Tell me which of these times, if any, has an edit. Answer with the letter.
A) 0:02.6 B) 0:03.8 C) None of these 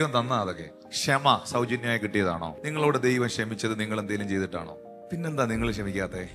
A